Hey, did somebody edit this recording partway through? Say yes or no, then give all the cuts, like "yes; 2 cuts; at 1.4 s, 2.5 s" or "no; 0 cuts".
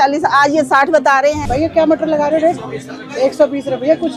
yes; 1 cut; at 1.4 s